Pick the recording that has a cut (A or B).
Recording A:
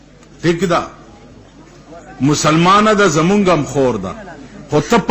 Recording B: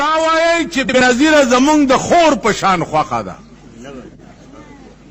B